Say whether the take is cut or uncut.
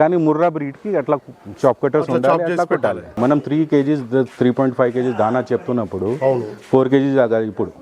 cut